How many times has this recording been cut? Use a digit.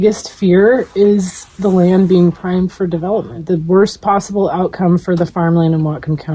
1